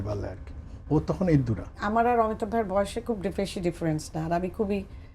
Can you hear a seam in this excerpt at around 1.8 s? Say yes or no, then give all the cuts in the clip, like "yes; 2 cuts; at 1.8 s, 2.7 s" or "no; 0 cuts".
yes; 1 cut; at 1.8 s